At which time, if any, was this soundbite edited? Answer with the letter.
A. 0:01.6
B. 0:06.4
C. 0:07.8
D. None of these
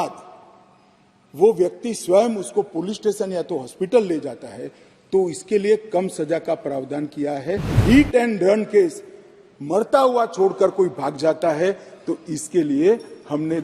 C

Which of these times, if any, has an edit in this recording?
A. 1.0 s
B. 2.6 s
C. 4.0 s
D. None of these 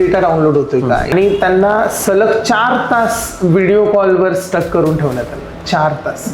A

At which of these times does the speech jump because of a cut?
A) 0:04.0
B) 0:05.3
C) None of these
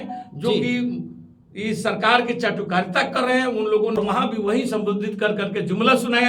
A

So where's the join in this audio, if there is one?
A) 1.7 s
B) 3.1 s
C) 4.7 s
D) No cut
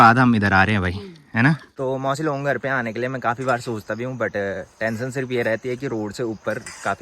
A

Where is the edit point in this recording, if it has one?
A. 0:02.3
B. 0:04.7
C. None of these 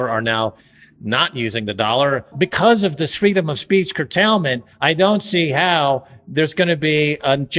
A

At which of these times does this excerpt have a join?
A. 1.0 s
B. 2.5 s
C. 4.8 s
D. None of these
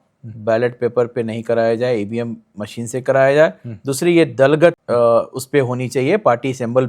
C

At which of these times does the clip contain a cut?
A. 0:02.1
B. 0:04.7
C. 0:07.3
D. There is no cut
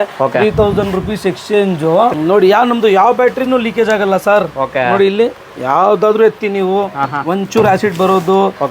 A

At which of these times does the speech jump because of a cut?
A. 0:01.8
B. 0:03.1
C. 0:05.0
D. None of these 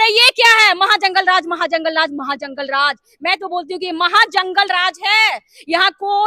D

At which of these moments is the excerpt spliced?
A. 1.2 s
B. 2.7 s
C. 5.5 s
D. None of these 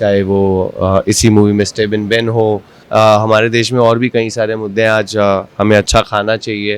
B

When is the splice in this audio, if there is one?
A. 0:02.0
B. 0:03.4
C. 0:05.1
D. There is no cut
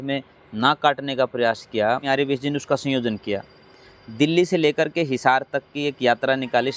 A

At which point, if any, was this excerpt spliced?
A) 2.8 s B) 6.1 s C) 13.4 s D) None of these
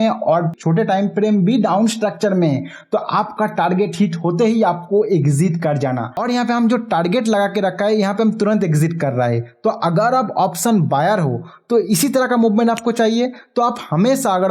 B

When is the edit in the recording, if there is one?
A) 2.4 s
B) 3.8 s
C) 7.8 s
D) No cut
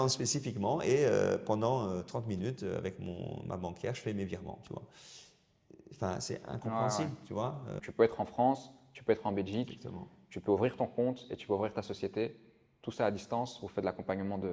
C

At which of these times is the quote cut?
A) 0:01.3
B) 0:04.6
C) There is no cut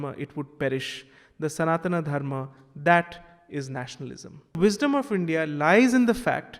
B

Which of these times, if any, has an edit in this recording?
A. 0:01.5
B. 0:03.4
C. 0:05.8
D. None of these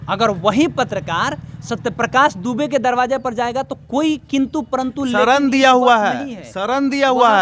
D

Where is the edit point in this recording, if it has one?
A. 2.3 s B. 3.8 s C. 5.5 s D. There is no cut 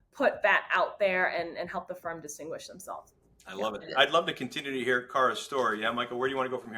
B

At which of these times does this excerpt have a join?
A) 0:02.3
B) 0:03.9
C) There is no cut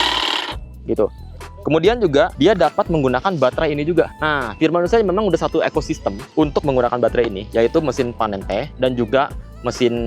A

